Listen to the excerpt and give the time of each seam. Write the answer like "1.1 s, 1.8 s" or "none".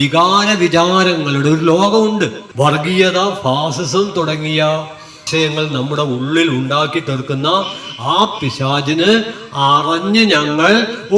2.5 s